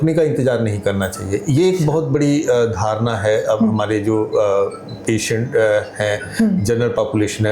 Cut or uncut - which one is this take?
uncut